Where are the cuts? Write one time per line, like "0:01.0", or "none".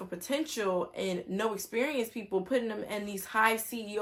none